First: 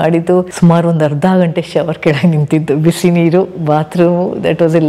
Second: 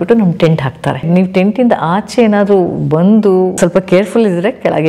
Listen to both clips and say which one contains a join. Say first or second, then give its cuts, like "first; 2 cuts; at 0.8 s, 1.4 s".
second; 2 cuts; at 1.1 s, 3.6 s